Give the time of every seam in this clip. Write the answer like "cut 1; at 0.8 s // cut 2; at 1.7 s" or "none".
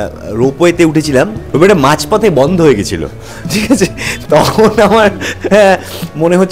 cut 1; at 1.4 s // cut 2; at 4.1 s

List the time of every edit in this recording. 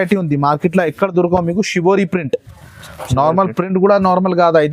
none

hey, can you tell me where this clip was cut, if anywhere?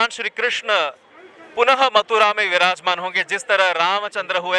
none

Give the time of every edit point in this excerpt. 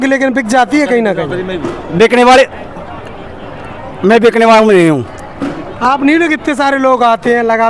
none

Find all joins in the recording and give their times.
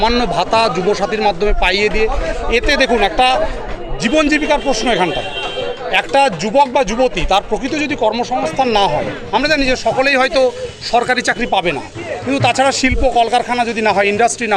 none

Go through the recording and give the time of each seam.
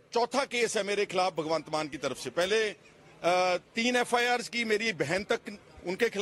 none

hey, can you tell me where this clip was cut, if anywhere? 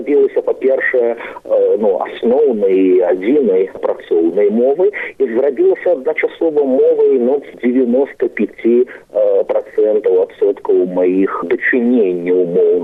none

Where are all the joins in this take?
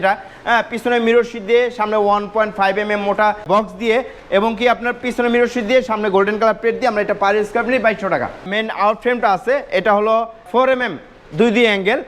cut 1; at 3.4 s // cut 2; at 8.5 s // cut 3; at 10.4 s

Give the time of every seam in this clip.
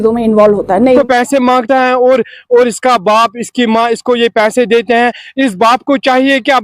cut 1; at 1.0 s

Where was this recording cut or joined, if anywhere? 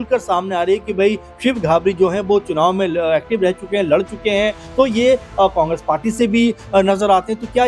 none

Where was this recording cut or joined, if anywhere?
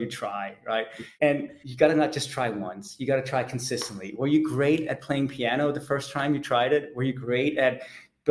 cut 1; at 1.0 s

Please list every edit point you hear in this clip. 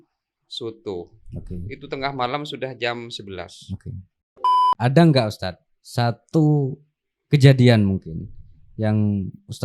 cut 1; at 4.3 s

